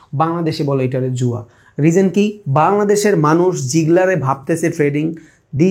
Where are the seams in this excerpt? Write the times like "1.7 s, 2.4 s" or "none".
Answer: none